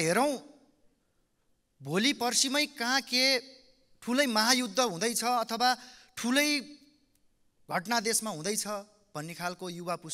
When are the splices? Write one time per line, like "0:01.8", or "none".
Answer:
none